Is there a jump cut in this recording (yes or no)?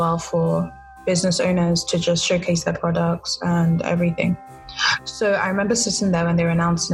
no